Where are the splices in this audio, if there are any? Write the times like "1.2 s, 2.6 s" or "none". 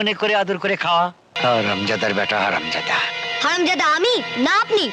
1.3 s